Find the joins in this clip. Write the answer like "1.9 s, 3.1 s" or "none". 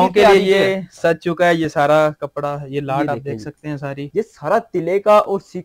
4.0 s

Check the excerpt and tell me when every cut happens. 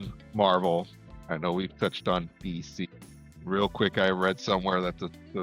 none

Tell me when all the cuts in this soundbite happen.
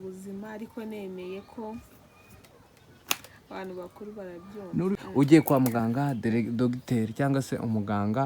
4.9 s

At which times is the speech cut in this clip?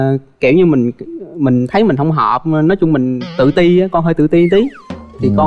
none

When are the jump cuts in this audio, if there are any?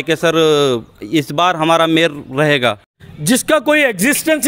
2.9 s

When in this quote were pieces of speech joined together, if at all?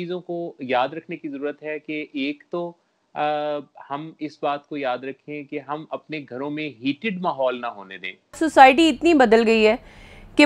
8.4 s

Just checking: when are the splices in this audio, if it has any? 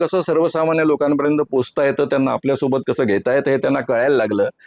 none

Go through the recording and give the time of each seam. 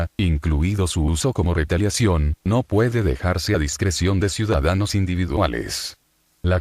3.6 s

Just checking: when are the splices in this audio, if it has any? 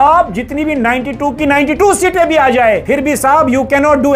2.8 s

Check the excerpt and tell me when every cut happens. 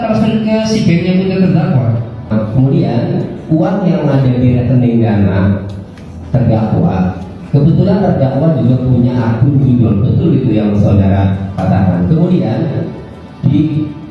2.3 s

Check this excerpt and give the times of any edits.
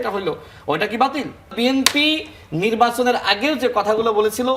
1.5 s

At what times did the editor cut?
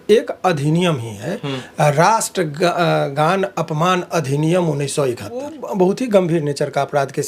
5.5 s

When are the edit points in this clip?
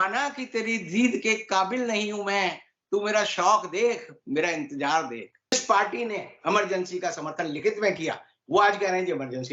5.5 s

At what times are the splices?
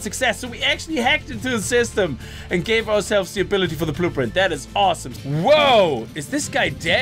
5.1 s

